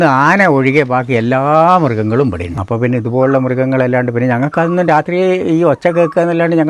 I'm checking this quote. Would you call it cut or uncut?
cut